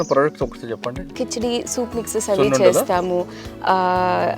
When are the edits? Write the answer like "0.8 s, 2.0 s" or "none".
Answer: 1.1 s